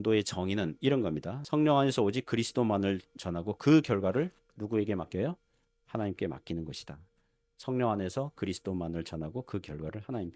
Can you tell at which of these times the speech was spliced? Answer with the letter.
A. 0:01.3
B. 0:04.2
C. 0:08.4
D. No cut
A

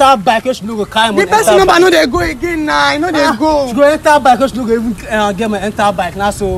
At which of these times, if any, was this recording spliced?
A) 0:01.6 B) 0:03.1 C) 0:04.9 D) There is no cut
D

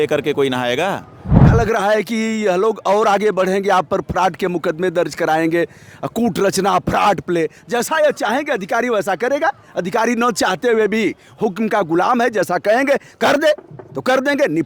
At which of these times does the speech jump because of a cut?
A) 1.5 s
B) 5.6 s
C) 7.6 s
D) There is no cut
A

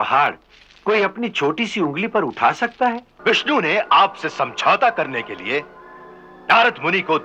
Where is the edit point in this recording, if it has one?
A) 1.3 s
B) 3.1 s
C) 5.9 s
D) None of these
B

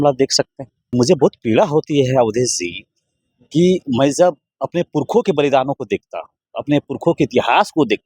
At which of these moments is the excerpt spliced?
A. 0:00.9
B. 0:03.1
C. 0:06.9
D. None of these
A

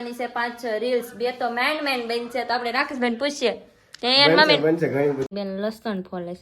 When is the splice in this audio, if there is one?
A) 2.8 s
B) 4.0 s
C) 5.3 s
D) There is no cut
C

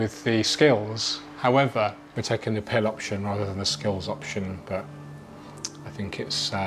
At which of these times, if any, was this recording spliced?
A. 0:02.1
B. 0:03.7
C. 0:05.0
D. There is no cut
A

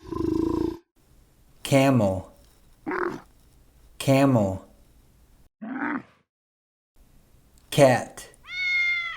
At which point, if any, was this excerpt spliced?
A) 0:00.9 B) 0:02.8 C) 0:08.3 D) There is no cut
A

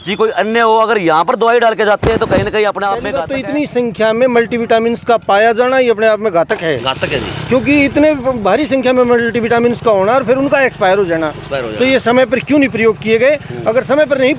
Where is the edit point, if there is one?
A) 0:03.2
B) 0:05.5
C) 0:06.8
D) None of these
A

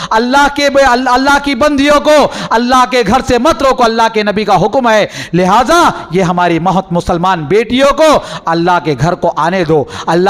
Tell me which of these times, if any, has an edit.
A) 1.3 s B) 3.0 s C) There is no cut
C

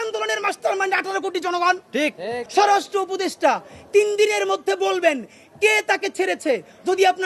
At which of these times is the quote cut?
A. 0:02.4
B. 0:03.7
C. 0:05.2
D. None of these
A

